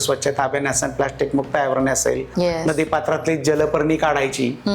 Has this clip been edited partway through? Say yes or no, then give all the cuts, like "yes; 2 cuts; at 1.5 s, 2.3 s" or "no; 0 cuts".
yes; 1 cut; at 2.3 s